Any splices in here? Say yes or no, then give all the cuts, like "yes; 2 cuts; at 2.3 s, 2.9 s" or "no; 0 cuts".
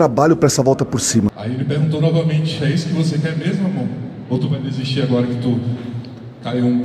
yes; 1 cut; at 1.4 s